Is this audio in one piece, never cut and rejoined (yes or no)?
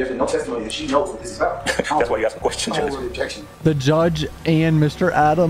no